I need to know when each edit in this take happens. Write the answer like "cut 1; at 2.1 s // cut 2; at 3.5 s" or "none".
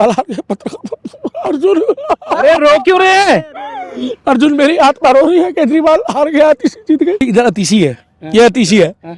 cut 1; at 7.2 s